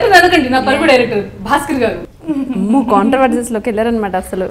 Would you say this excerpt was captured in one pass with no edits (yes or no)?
no